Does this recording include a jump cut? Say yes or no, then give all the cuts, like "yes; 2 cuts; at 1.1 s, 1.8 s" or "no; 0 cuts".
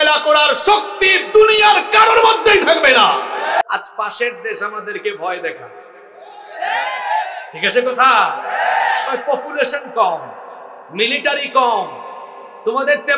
yes; 1 cut; at 3.6 s